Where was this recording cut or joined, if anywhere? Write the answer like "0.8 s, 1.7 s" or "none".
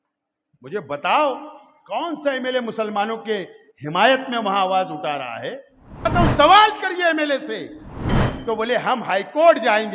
6.1 s, 8.3 s